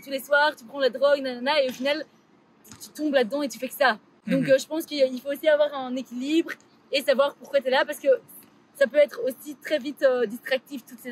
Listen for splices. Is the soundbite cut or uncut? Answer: uncut